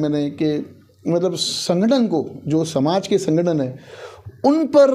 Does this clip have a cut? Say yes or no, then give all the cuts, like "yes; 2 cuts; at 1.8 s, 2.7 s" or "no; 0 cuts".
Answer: no; 0 cuts